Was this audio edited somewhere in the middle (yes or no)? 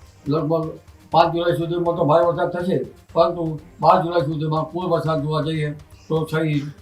no